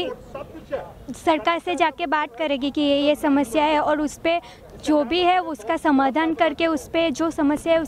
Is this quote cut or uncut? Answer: uncut